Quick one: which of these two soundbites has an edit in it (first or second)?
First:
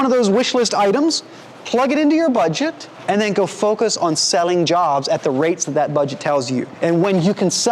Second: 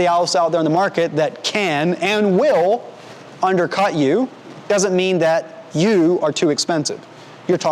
first